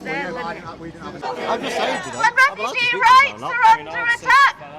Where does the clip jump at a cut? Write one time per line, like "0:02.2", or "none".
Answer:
0:01.2